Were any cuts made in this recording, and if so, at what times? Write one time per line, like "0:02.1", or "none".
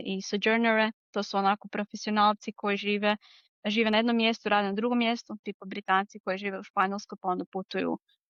none